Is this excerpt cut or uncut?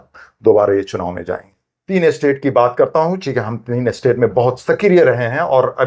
cut